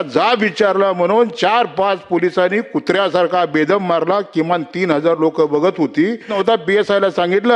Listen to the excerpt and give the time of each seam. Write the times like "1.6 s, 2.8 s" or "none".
6.3 s